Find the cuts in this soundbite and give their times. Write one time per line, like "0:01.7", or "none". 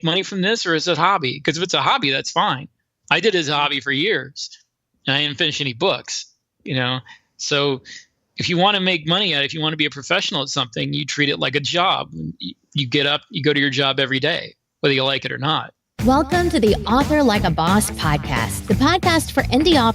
0:15.8